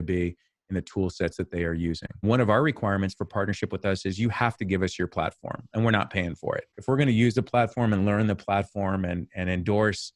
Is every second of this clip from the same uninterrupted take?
no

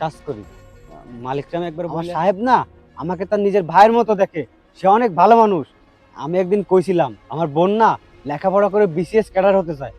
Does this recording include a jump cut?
yes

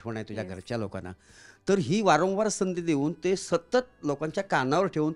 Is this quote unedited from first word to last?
yes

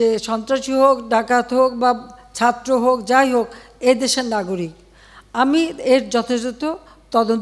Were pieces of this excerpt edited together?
no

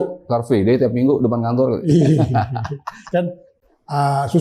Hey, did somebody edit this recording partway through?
no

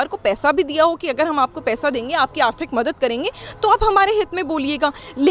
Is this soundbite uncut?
yes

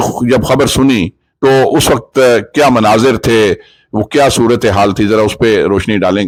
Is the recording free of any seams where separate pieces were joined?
yes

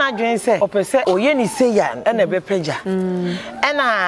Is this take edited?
yes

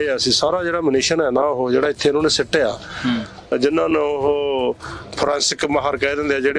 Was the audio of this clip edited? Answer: yes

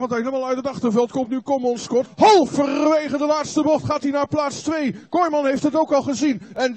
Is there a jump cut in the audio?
yes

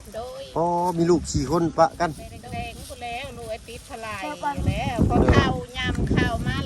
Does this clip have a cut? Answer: yes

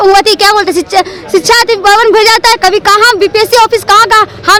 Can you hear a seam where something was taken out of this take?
no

